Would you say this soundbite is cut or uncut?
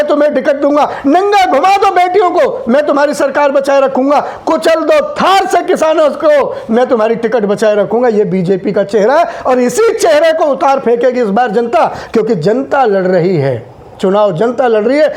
uncut